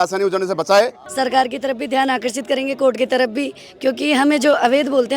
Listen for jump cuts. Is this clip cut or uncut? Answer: cut